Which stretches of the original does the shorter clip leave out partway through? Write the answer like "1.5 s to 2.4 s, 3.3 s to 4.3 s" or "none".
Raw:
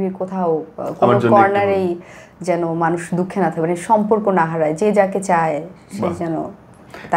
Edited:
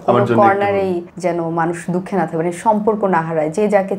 2.0 s to 2.3 s